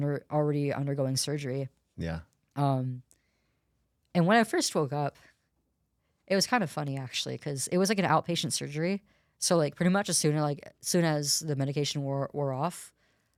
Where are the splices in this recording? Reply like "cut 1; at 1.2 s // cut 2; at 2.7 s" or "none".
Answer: none